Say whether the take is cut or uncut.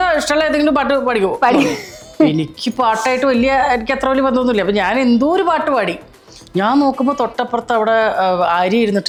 uncut